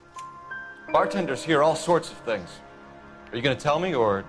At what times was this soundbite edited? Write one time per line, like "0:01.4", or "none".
0:00.9